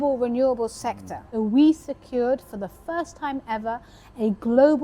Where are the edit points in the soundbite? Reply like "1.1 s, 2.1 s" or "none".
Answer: 1.3 s